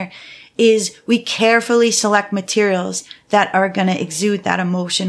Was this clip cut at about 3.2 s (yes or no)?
no